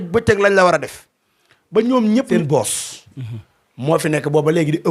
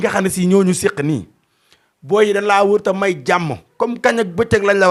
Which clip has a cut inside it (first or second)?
first